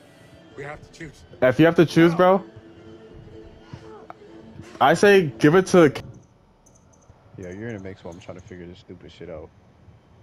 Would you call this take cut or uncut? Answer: cut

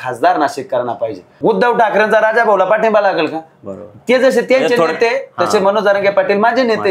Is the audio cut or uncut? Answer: cut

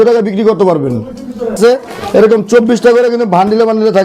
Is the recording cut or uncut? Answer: cut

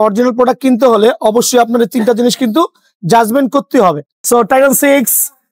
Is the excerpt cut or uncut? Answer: cut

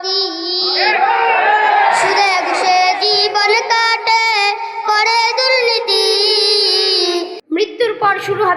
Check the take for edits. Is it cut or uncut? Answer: cut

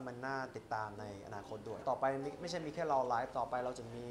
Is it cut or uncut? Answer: cut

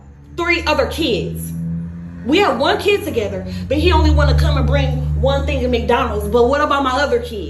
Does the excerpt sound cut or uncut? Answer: cut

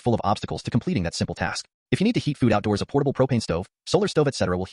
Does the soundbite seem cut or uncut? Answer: uncut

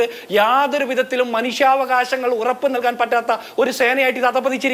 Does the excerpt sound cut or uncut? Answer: uncut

